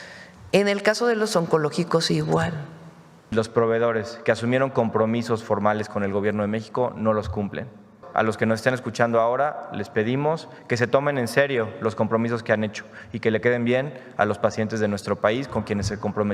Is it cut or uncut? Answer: cut